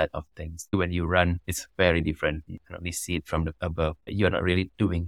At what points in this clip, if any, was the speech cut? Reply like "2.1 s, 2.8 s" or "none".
0.7 s, 2.5 s

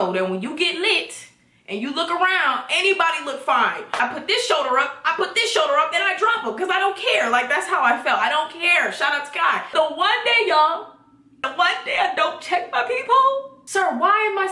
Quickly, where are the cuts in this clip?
4.0 s, 9.7 s, 11.4 s, 13.6 s

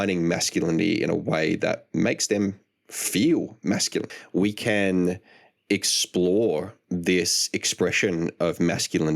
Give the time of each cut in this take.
4.2 s

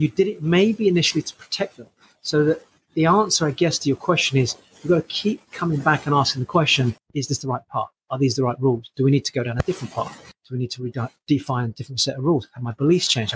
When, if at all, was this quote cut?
7.0 s, 10.3 s

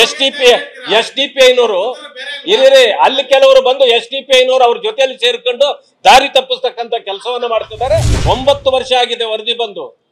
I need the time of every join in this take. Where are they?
8.1 s

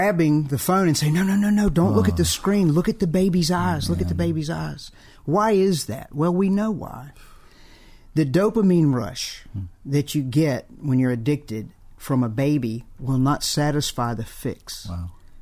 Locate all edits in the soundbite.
none

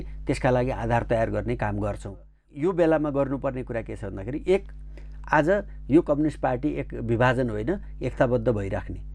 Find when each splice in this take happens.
2.4 s

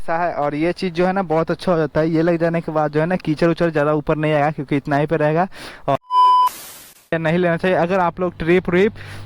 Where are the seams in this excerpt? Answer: 6.0 s, 7.2 s

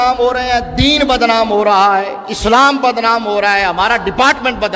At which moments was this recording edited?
none

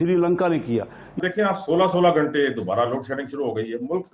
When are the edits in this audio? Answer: 1.0 s

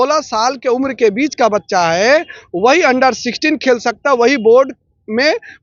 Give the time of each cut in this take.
none

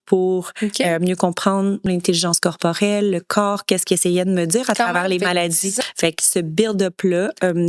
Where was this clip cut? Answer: 1.9 s, 5.8 s

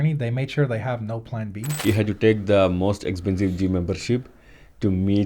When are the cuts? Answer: 1.6 s

